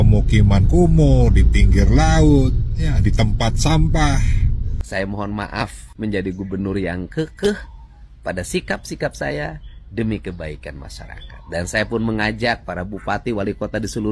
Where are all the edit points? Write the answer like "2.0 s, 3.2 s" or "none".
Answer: 4.8 s